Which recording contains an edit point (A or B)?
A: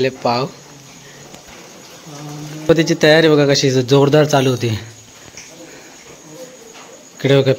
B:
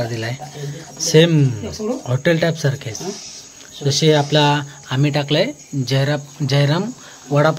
A